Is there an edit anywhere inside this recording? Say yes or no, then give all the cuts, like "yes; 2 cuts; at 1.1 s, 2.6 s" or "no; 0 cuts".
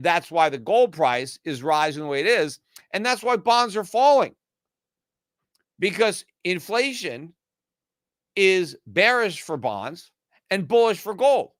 no; 0 cuts